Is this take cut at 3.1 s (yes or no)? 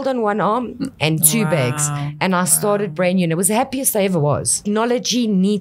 no